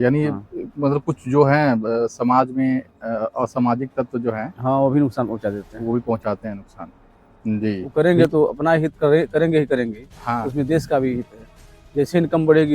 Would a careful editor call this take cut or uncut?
cut